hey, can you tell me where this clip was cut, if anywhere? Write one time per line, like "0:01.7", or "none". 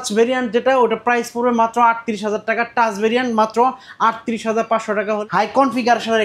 0:05.2